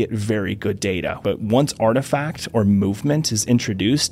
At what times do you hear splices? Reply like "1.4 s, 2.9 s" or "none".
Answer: 1.2 s